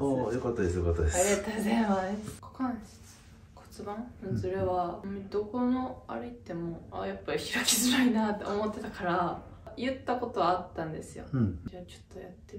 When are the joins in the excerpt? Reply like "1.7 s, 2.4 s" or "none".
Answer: 2.4 s, 5.0 s, 6.8 s, 9.7 s, 11.6 s

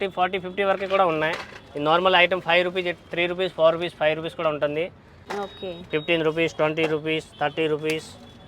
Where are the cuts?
5.2 s

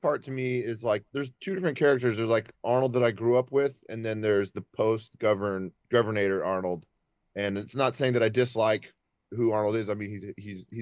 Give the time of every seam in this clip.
1.1 s

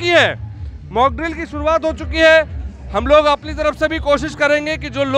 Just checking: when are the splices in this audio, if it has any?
none

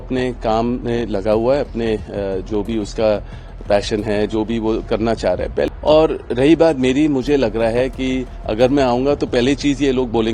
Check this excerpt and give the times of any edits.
5.7 s

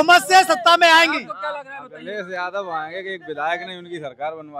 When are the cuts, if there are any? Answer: none

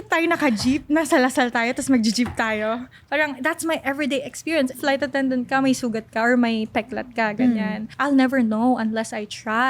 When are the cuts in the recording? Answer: 4.7 s, 7.8 s

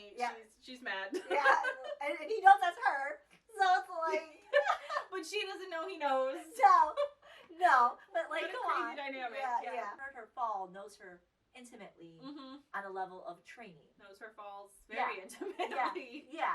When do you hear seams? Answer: 10.1 s

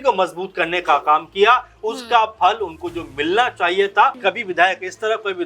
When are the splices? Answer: 4.2 s

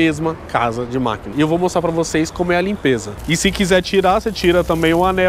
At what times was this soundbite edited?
1.3 s, 3.1 s

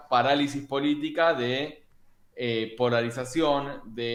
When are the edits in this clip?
none

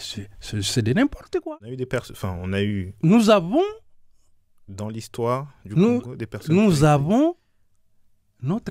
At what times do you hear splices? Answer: 1.4 s

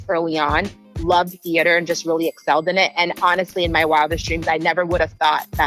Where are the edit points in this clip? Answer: none

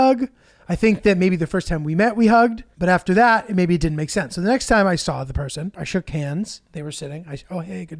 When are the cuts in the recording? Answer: 2.7 s, 5.8 s

